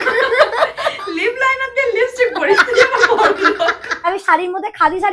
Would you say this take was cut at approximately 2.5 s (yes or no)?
no